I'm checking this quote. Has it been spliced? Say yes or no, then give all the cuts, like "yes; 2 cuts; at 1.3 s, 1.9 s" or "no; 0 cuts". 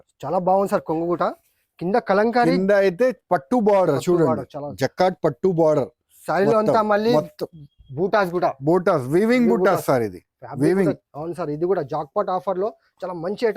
no; 0 cuts